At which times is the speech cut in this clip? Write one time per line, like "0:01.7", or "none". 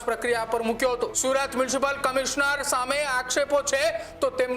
0:01.1